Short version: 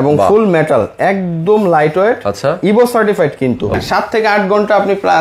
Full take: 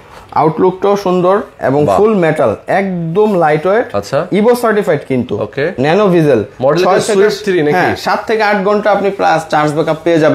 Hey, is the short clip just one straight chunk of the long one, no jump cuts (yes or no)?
no